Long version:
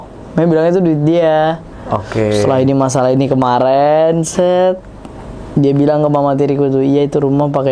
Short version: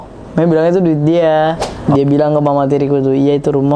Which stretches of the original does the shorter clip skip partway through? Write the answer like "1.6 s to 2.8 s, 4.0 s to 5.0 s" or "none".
1.7 s to 5.4 s